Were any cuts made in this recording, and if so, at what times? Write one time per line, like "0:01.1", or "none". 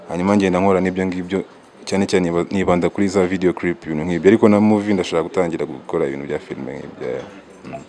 none